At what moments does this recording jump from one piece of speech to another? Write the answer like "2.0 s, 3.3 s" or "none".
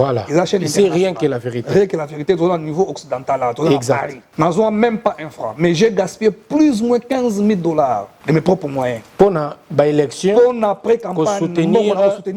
4.2 s, 8.1 s, 9.0 s